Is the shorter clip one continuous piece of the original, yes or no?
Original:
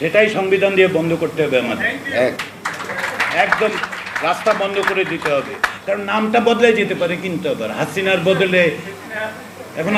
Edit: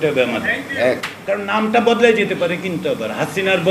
no